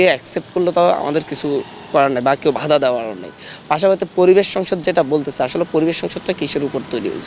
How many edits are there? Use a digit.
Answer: 0